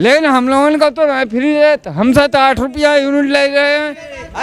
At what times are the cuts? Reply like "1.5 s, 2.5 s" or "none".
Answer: none